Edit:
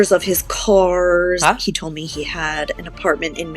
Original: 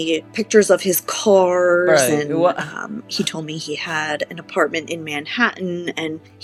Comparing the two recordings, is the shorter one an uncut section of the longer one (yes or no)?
no